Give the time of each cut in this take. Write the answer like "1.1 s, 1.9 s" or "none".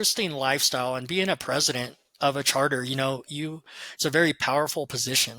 none